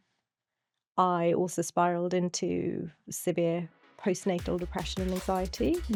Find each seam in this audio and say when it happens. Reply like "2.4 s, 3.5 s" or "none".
none